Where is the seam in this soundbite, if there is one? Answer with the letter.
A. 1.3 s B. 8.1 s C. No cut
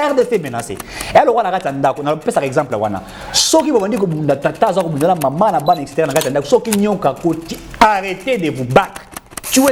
C